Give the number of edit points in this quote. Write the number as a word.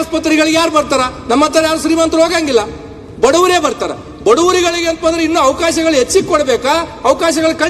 zero